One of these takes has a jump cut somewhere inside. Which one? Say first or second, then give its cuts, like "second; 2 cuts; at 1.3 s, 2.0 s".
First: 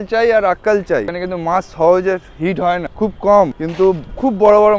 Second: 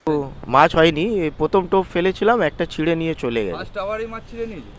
first; 3 cuts; at 1.2 s, 2.9 s, 3.6 s